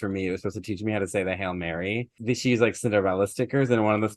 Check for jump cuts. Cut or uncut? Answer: cut